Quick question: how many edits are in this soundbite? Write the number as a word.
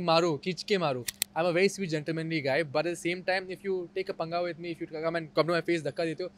one